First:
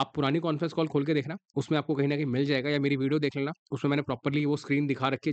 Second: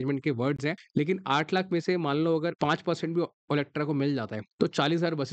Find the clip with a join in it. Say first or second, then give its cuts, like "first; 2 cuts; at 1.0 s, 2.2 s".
second; 3 cuts; at 0.8 s, 2.5 s, 4.4 s